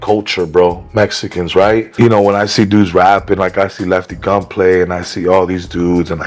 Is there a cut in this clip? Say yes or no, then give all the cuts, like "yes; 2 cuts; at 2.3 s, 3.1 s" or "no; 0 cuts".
yes; 1 cut; at 1.9 s